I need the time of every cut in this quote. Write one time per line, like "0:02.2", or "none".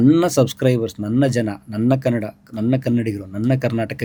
none